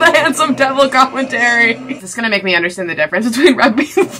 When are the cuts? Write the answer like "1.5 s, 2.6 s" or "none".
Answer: 1.9 s